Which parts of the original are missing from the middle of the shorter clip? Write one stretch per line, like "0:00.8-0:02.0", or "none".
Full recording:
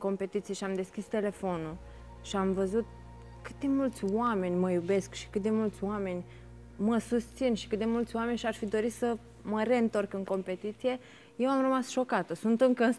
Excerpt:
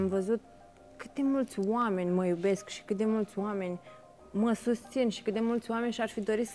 none